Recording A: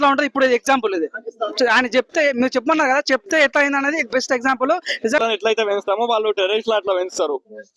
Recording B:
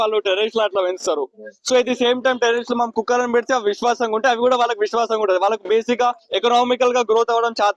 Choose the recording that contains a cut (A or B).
A